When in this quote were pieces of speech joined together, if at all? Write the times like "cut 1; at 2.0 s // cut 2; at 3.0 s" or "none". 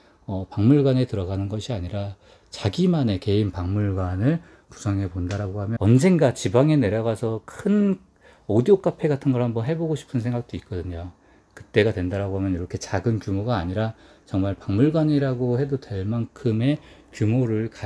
cut 1; at 5.8 s